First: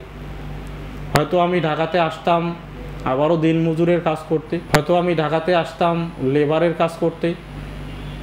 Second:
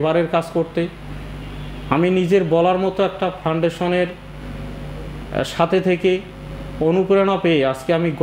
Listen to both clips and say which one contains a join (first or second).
first